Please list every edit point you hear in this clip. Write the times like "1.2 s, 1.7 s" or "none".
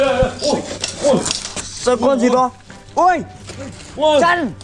none